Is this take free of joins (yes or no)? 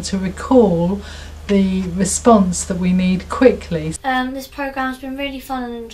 no